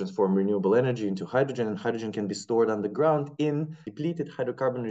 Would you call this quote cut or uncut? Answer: cut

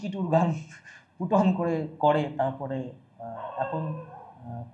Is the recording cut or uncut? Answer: uncut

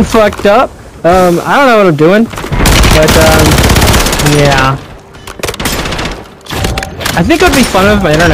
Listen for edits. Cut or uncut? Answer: uncut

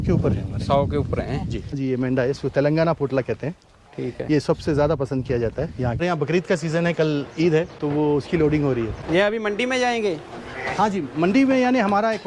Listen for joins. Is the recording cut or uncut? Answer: cut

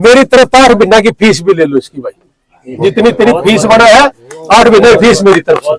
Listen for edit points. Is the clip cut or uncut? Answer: uncut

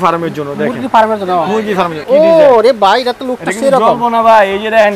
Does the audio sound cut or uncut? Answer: cut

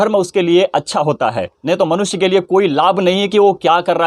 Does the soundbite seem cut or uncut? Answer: cut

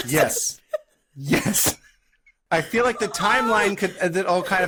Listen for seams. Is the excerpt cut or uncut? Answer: uncut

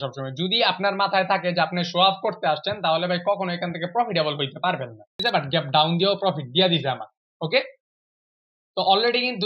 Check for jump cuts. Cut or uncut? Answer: cut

